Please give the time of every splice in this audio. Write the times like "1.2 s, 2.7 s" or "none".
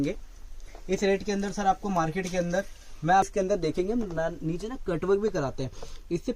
3.3 s